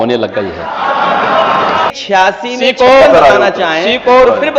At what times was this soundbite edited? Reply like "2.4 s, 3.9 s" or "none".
1.9 s